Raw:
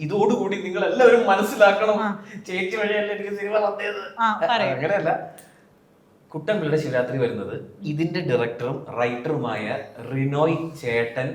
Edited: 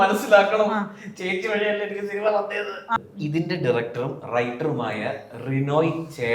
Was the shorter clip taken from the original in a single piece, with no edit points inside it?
no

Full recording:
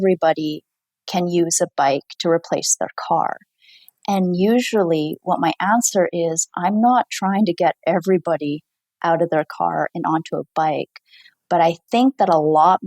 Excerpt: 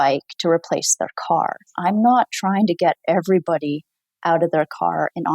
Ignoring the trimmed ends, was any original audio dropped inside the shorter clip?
yes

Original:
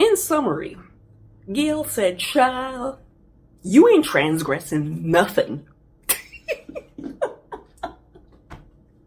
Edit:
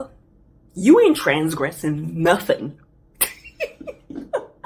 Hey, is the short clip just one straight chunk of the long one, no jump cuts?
yes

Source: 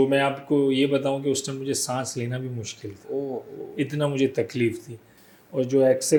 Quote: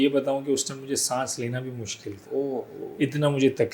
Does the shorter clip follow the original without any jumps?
yes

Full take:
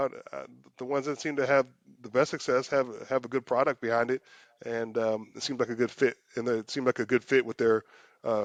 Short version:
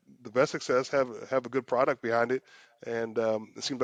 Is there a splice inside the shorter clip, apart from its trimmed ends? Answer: no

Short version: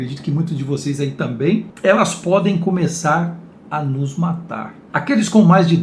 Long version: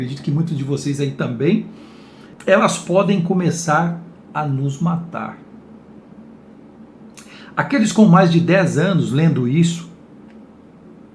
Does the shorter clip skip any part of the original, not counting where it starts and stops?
yes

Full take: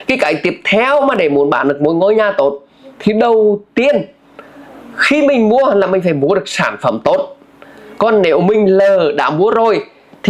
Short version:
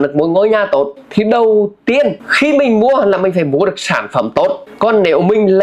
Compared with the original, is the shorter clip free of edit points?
no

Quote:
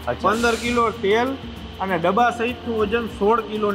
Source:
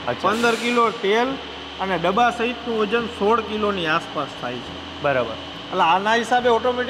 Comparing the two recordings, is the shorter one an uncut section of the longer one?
yes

